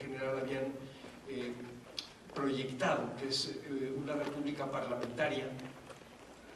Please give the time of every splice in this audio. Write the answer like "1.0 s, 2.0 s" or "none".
5.6 s